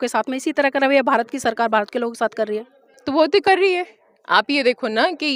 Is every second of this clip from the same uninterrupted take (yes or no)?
yes